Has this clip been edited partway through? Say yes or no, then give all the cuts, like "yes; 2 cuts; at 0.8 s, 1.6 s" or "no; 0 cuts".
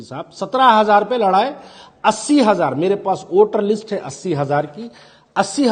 no; 0 cuts